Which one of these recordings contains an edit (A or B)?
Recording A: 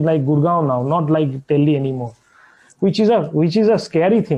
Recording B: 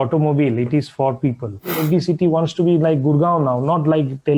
B